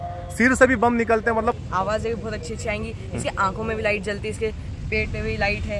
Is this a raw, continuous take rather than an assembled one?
no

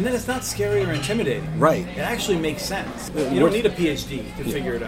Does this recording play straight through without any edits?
no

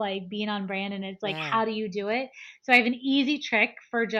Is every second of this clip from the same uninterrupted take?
yes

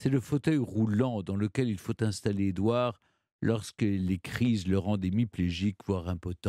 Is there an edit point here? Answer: no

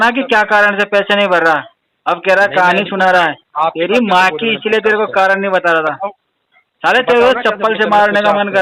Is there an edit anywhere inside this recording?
no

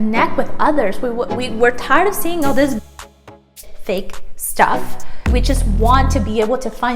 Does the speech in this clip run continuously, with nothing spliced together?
yes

